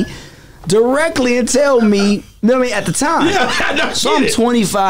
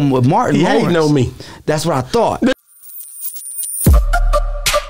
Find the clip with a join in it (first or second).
second